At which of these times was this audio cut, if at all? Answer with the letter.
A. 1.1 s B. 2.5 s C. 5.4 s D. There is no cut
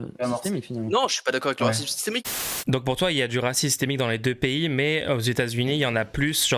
B